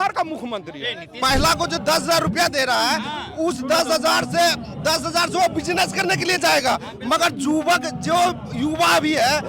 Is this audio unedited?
no; 1 cut; at 1.1 s

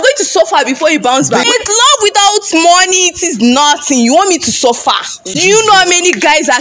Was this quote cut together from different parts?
yes; 2 cuts; at 1.4 s, 5.2 s

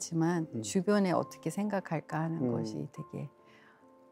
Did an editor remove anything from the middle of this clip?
no; 0 cuts

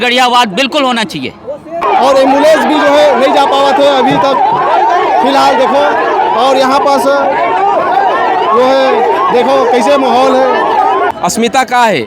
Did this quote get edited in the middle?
yes; 2 cuts; at 1.8 s, 11.1 s

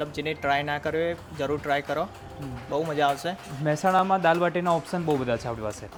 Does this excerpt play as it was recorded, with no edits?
yes; 0 cuts

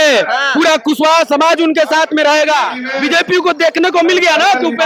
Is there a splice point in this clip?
yes; 1 cut; at 2.8 s

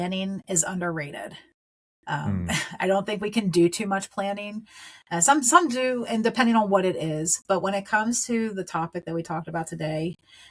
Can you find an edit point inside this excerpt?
no; 0 cuts

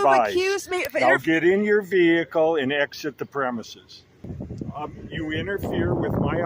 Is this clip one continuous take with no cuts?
no; 1 cut; at 4.4 s

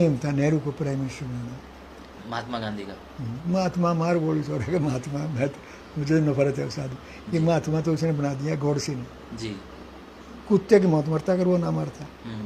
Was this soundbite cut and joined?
no; 0 cuts

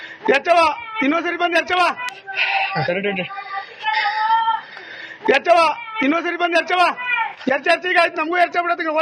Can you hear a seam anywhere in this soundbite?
yes; 1 cut; at 3.3 s

